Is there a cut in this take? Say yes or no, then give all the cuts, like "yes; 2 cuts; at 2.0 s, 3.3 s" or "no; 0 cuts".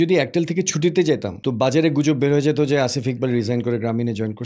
yes; 1 cut; at 1.3 s